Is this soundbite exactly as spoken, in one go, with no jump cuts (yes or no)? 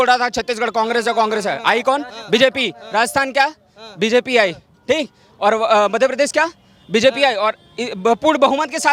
yes